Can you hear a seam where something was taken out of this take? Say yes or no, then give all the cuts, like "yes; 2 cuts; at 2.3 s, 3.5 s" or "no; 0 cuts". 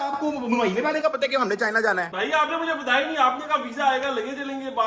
no; 0 cuts